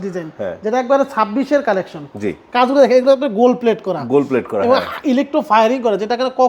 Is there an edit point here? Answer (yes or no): no